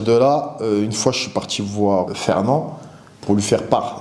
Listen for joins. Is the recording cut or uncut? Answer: cut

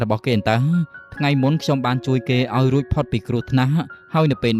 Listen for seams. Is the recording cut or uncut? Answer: uncut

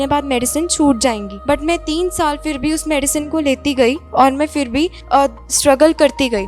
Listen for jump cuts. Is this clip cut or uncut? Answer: cut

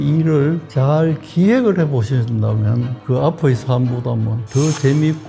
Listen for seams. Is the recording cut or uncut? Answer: cut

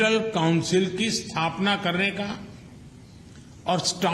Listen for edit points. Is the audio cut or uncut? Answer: uncut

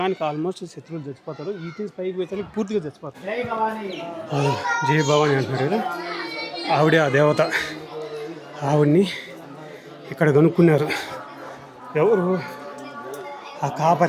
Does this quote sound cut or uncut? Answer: cut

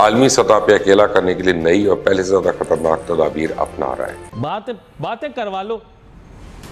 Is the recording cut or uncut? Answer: cut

